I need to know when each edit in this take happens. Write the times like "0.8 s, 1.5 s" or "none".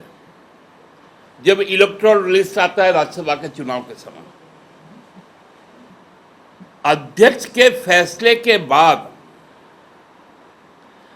5.9 s